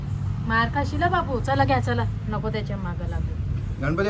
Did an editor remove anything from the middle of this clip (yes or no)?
no